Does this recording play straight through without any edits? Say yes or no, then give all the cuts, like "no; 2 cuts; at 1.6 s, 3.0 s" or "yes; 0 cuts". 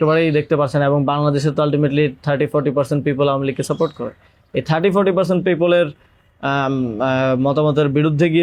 yes; 0 cuts